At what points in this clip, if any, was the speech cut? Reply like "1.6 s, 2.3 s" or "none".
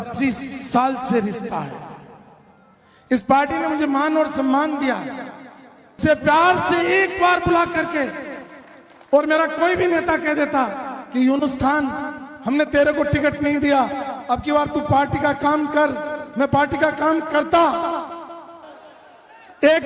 6.0 s, 18.5 s